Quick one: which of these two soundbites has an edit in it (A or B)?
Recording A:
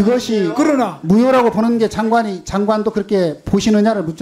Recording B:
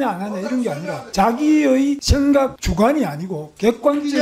B